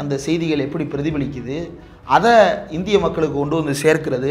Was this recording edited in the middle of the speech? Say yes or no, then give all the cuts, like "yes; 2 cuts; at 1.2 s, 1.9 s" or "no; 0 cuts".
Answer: no; 0 cuts